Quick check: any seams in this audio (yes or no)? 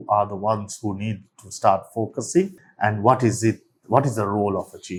no